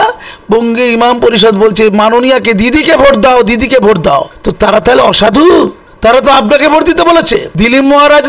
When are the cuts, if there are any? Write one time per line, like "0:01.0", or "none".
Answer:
0:04.4
0:05.8
0:07.5

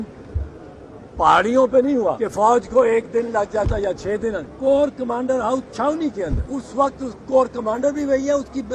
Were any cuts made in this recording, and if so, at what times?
0:02.1
0:04.5
0:06.4

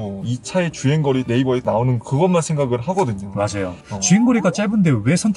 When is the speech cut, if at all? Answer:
0:01.3
0:03.8

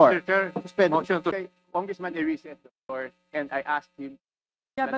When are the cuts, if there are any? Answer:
0:01.3

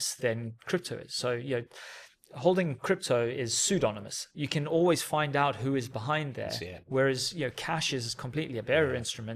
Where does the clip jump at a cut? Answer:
none

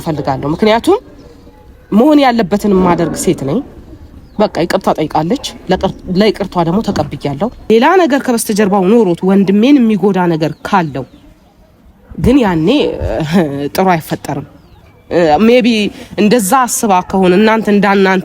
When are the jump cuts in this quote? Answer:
0:07.7

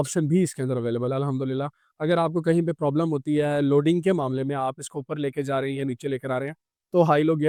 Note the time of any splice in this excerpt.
none

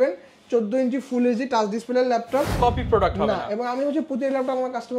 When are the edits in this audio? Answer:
0:02.6

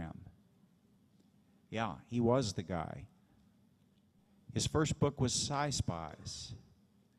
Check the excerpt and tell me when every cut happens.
none

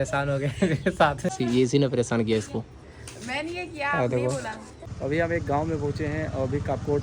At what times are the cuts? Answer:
0:01.3
0:04.9

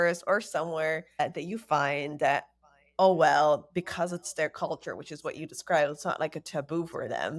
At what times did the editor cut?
0:01.2

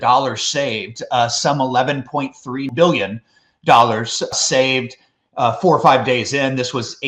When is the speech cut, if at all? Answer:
0:02.7
0:04.3

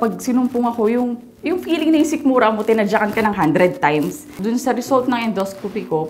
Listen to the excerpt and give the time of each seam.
0:04.4

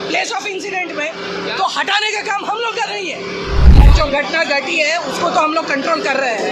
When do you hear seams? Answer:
0:03.9

